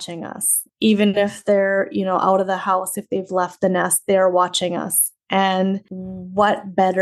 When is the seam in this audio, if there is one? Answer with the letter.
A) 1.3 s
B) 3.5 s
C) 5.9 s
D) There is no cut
D